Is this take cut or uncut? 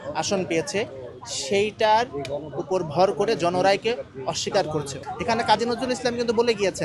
cut